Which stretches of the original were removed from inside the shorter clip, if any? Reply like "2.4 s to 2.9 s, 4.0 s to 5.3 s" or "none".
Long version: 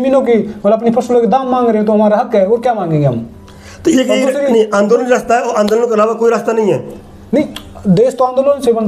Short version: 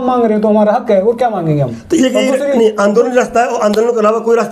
3.2 s to 3.7 s